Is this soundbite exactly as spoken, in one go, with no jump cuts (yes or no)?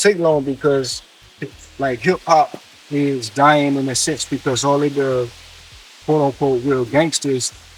yes